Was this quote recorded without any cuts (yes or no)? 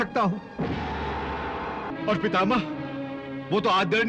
no